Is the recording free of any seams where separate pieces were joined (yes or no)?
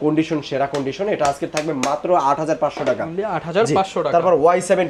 yes